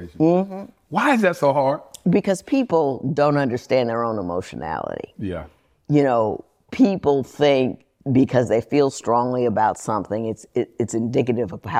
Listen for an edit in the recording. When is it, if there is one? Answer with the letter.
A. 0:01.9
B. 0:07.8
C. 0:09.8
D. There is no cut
A